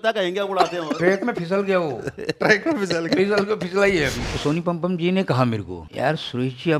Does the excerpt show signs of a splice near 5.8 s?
yes; 2 cuts; at 4.2 s, 5.8 s

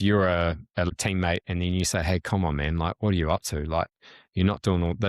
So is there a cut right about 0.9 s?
yes; 1 cut; at 0.9 s

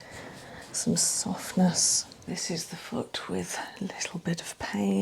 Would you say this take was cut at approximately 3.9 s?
no; 1 cut; at 2.3 s

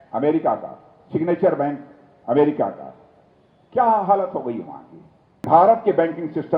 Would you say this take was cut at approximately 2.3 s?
no; 1 cut; at 5.5 s

